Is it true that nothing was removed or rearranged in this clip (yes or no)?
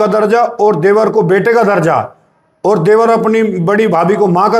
yes